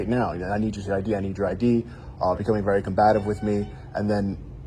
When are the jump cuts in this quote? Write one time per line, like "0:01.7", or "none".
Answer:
none